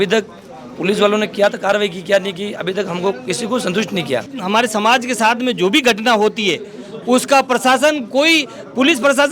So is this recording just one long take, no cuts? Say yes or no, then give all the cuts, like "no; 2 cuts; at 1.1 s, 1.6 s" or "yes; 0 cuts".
no; 1 cut; at 4.3 s